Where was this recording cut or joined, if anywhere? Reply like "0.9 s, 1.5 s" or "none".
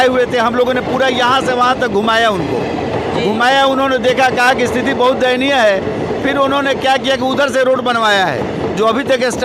none